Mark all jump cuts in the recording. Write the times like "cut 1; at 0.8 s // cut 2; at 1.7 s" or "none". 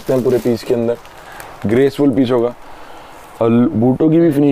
none